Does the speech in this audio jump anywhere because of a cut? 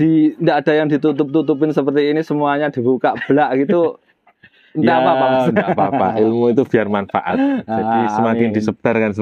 no; 0 cuts

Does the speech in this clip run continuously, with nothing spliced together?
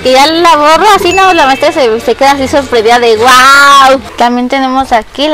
no; 1 cut; at 4.1 s

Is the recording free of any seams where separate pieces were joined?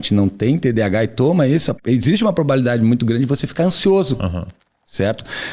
no; 1 cut; at 1.7 s

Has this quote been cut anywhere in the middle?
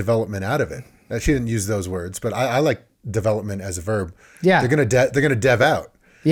no; 0 cuts

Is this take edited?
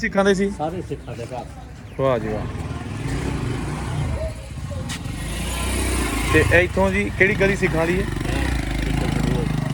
no; 0 cuts

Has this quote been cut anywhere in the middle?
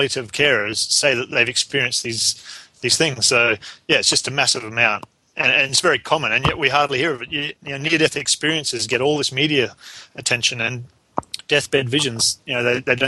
no; 0 cuts

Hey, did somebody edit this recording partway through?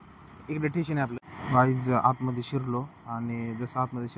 yes; 1 cut; at 1.3 s

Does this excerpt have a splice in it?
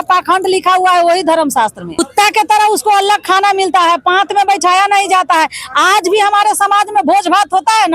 yes; 1 cut; at 1.8 s

